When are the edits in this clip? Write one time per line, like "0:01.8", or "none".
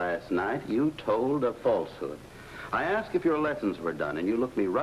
0:01.5